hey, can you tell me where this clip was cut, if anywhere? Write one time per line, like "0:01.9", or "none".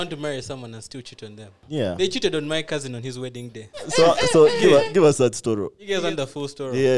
0:01.6
0:03.9
0:05.8